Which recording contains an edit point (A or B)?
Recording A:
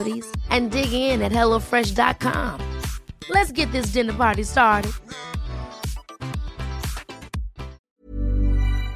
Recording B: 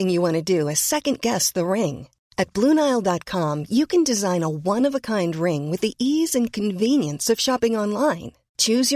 A